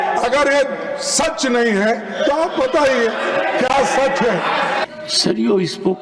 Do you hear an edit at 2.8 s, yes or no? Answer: no